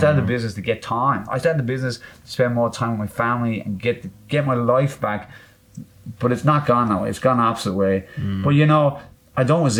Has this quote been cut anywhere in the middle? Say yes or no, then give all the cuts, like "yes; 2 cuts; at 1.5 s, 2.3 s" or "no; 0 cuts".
no; 0 cuts